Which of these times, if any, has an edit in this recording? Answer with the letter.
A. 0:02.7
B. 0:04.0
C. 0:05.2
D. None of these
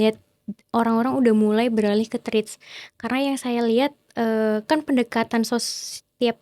D